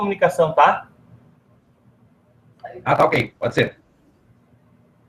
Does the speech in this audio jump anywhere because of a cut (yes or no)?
no